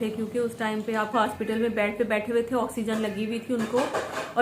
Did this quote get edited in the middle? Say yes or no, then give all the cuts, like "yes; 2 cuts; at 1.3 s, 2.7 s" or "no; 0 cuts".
yes; 1 cut; at 1.1 s